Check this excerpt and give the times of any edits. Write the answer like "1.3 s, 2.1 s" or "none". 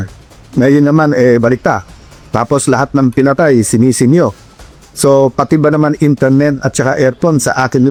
none